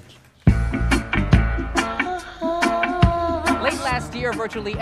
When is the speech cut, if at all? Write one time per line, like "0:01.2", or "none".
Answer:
0:01.5